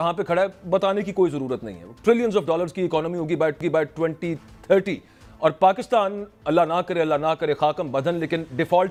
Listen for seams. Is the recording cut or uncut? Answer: uncut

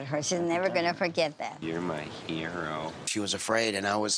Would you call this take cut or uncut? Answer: cut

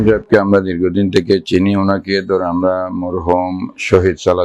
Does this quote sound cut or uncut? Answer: uncut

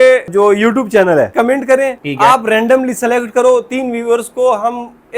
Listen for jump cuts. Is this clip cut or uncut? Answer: cut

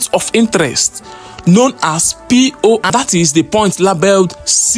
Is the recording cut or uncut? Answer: cut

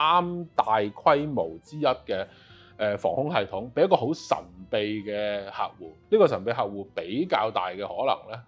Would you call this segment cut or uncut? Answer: cut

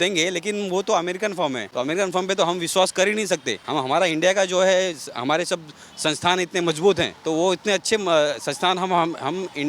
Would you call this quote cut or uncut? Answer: cut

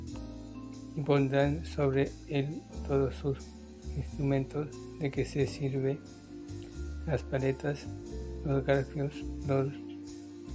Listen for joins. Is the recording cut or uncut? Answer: cut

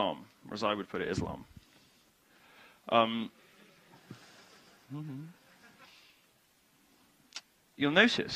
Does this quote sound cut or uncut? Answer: uncut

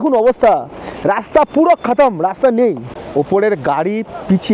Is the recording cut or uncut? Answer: cut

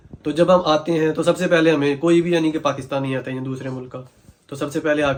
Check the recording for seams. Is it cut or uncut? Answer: uncut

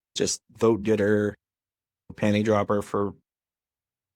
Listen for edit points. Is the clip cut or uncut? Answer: cut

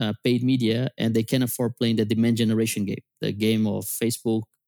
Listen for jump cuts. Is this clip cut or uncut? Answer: uncut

